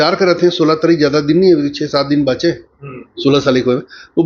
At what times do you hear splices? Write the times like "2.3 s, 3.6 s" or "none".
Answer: none